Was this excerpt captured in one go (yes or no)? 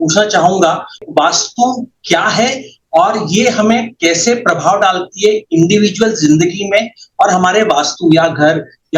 no